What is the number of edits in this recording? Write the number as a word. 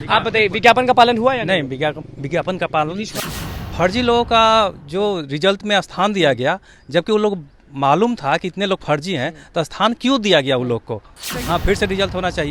two